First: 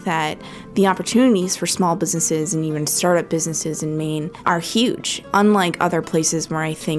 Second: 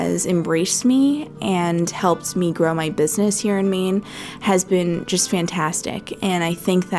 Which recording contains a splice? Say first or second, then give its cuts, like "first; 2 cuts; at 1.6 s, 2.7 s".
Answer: first; 2 cuts; at 4.3 s, 5.2 s